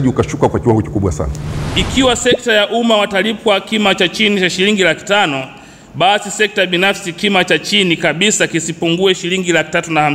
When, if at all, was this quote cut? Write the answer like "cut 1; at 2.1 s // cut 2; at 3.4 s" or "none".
cut 1; at 1.6 s